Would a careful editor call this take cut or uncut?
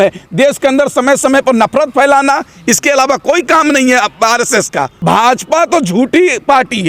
cut